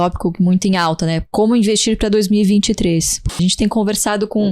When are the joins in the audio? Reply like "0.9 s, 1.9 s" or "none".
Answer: 3.3 s